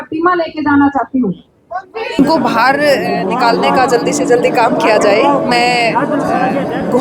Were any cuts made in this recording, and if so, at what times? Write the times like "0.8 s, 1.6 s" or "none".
2.2 s